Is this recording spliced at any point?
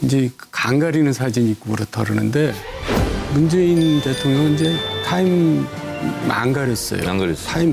yes; 1 cut; at 4.9 s

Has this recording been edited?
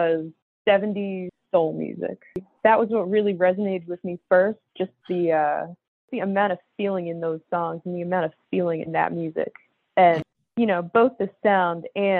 yes; 3 cuts; at 2.5 s, 6.1 s, 10.4 s

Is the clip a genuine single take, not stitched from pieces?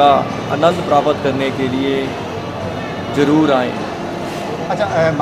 yes; 0 cuts

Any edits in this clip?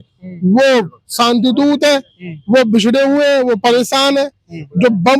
no; 0 cuts

